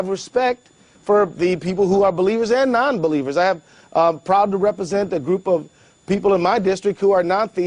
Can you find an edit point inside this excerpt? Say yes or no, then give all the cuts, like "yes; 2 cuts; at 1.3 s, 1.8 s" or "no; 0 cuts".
no; 0 cuts